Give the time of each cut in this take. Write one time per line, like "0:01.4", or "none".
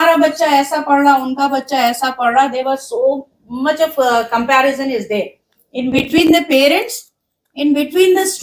none